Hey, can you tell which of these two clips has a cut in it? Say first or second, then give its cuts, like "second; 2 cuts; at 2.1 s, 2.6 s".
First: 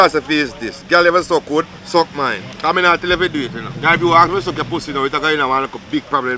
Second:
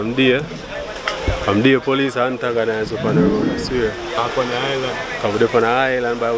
first; 3 cuts; at 1.8 s, 2.5 s, 3.7 s